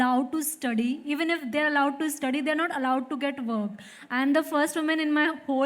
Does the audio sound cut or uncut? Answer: uncut